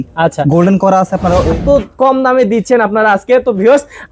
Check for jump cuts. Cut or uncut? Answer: cut